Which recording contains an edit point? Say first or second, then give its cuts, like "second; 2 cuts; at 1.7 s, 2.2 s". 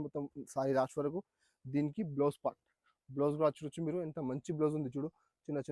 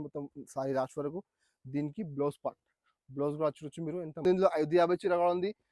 second; 1 cut; at 4.2 s